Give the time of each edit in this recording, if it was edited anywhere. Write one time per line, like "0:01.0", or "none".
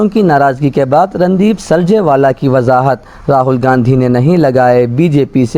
none

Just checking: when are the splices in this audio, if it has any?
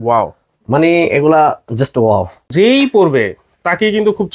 0:02.5

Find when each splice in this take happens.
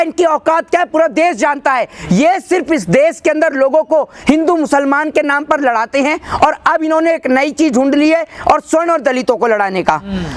none

